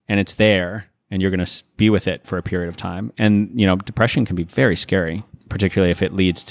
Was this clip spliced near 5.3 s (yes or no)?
yes